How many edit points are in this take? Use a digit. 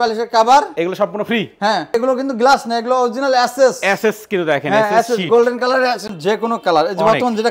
2